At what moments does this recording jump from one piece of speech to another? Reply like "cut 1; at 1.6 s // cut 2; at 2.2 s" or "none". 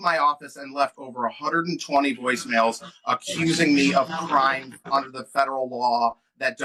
none